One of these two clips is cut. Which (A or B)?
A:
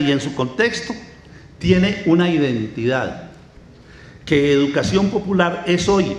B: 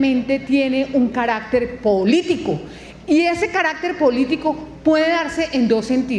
B